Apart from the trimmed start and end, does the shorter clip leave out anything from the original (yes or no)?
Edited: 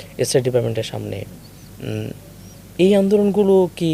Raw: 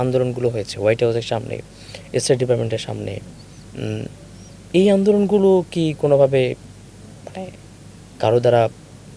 no